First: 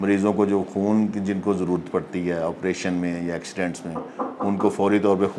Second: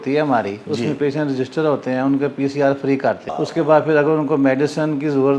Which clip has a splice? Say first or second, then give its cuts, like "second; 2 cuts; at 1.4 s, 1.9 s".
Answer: second; 1 cut; at 3.3 s